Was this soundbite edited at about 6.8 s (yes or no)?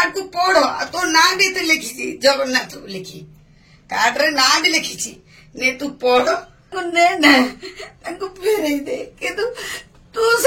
yes